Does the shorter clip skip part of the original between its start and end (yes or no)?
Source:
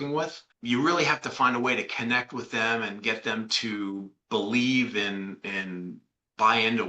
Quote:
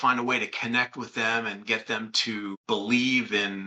yes